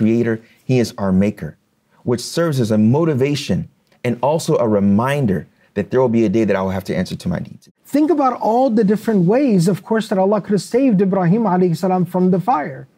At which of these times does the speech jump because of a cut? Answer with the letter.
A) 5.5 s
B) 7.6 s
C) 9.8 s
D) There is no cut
B